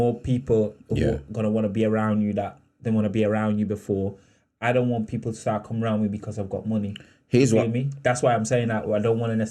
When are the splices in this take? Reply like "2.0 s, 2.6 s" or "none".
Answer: none

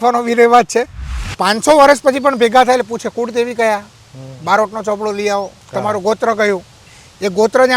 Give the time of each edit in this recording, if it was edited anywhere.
1.3 s

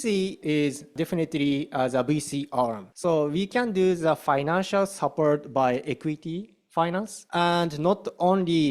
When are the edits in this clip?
0.9 s, 2.9 s, 7.2 s

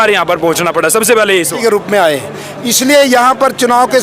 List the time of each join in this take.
1.2 s

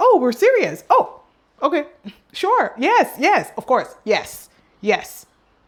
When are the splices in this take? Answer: none

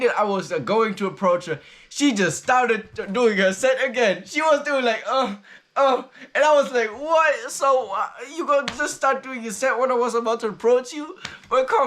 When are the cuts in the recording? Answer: none

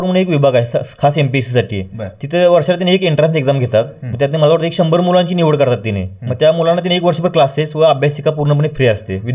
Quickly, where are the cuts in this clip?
none

